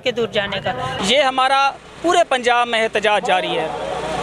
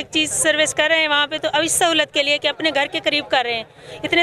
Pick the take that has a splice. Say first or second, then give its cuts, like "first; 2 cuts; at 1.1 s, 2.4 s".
first; 1 cut; at 0.9 s